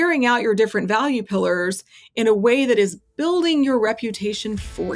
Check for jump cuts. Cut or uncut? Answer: uncut